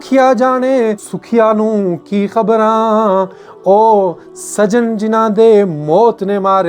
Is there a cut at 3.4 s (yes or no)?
no